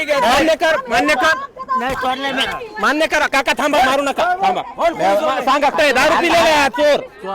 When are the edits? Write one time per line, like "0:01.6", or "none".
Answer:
0:05.7

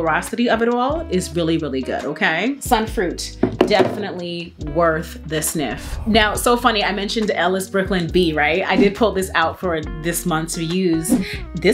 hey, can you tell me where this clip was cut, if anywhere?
none

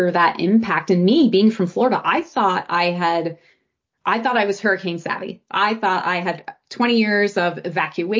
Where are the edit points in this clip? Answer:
none

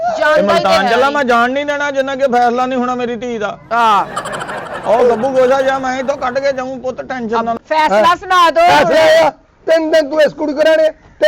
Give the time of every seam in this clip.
0:07.5

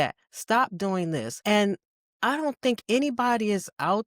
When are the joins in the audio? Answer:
0:01.3

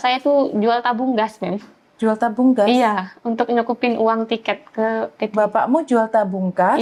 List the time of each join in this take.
none

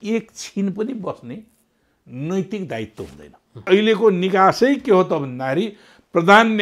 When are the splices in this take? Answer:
0:03.7

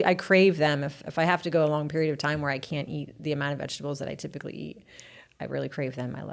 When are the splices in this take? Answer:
none

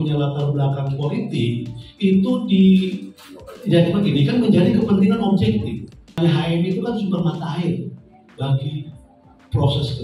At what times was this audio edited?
0:06.2

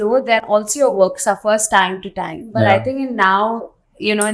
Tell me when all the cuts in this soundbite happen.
none

